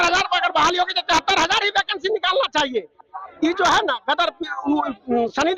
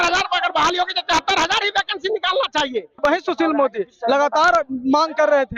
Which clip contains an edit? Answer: second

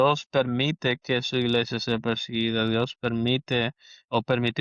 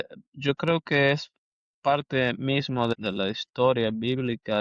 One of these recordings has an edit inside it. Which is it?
second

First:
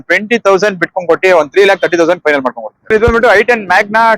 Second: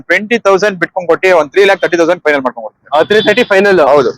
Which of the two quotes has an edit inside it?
first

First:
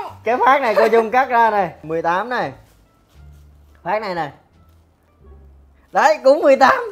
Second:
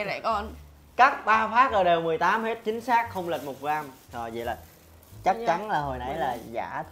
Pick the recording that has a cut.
first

